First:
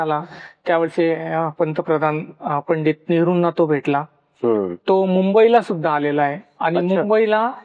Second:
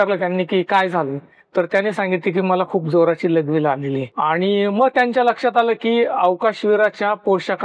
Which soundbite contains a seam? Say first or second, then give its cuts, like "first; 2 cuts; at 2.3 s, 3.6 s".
second; 1 cut; at 4.1 s